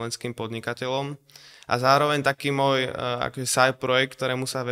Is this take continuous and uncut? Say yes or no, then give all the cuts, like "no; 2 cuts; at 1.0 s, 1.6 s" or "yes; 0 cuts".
yes; 0 cuts